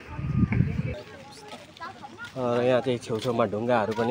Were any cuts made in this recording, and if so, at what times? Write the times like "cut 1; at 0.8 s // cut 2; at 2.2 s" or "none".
cut 1; at 1.0 s